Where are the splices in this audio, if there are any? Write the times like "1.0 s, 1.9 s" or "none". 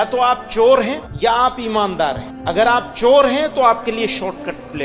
1.1 s, 2.3 s